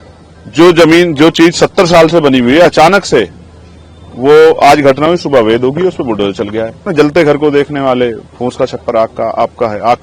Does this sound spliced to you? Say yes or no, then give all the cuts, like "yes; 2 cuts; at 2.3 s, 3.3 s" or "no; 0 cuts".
yes; 1 cut; at 6.9 s